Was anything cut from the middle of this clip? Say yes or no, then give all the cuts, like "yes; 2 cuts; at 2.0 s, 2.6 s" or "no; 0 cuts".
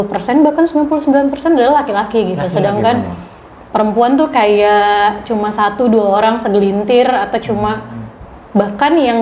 no; 0 cuts